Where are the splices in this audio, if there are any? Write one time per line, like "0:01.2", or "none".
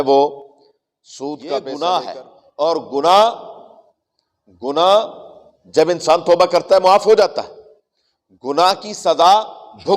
0:01.3